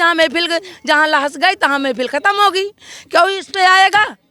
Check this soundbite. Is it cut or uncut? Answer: uncut